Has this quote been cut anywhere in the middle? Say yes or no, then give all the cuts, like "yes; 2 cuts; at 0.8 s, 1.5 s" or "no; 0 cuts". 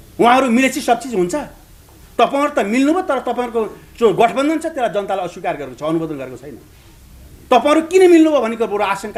no; 0 cuts